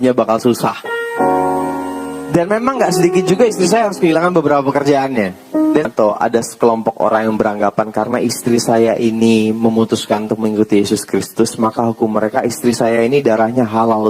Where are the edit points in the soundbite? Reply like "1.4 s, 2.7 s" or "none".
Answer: 5.9 s